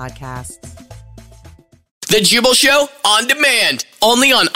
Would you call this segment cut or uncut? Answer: cut